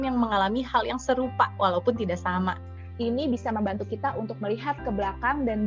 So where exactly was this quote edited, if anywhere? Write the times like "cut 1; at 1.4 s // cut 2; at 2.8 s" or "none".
cut 1; at 4.7 s